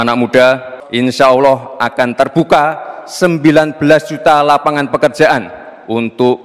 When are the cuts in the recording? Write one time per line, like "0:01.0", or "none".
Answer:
none